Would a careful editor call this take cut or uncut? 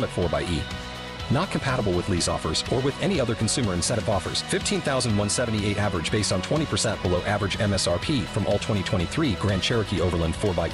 uncut